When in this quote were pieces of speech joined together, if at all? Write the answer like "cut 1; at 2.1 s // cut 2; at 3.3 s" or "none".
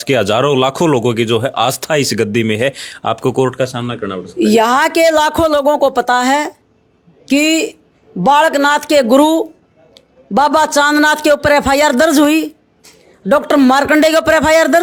none